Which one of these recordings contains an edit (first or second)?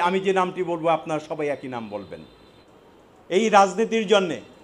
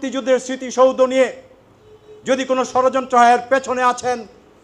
first